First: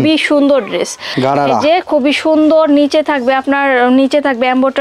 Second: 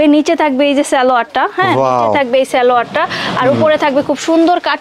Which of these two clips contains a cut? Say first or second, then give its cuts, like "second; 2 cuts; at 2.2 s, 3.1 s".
first; 1 cut; at 1.1 s